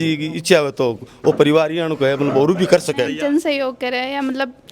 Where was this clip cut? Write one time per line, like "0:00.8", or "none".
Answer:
0:03.1